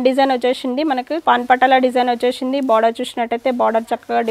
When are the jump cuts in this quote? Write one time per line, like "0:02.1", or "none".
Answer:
0:01.2